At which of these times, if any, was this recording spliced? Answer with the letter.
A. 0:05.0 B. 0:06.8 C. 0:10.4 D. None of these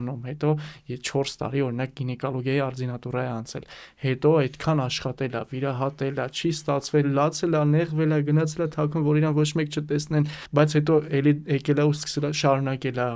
C